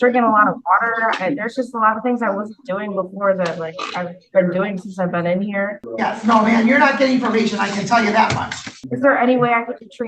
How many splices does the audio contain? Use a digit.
2